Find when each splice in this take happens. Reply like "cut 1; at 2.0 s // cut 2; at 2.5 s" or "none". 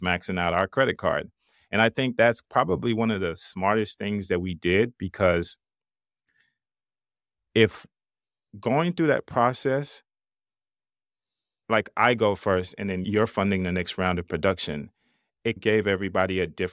cut 1; at 2.4 s